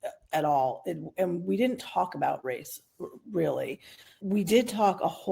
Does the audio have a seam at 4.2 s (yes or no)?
yes